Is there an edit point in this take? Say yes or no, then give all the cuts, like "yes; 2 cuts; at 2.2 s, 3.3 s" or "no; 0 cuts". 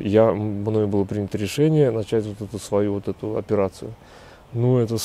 no; 0 cuts